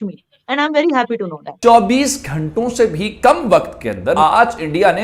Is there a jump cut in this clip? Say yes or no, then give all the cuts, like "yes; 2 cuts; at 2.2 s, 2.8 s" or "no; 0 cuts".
yes; 2 cuts; at 1.5 s, 4.2 s